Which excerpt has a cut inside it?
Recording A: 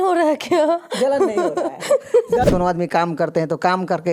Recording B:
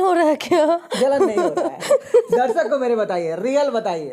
A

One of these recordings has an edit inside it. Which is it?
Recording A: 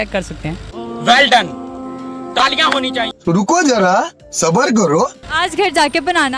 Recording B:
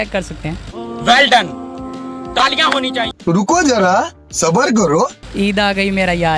B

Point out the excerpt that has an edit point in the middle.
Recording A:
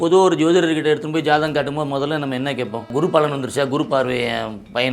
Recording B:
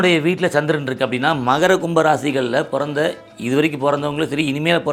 A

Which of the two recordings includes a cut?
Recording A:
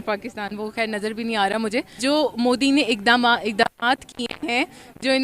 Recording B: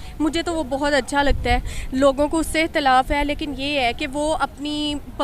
A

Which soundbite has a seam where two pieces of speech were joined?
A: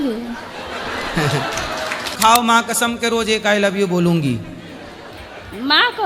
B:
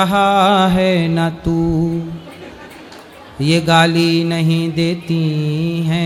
A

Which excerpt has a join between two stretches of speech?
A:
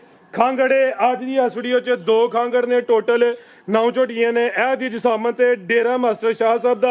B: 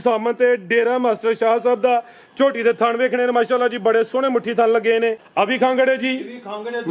B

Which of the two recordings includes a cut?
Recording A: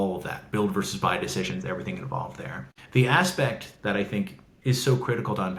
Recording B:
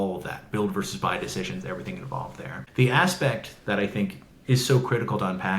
B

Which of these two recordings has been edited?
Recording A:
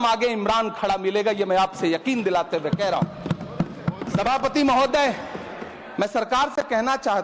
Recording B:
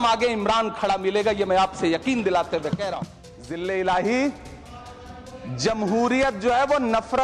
B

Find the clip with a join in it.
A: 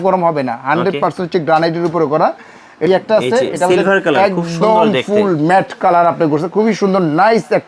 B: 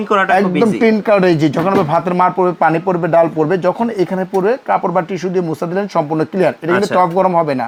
A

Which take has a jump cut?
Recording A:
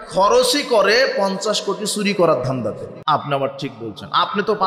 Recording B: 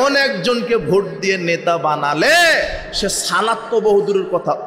A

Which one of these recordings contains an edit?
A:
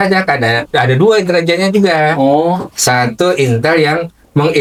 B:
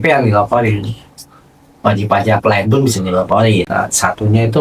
B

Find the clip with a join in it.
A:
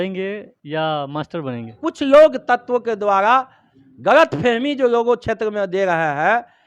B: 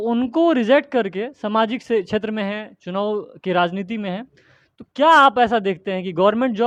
A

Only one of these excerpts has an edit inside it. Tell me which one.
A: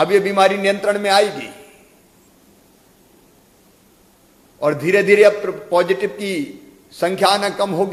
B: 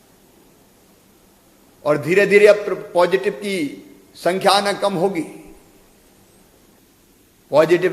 B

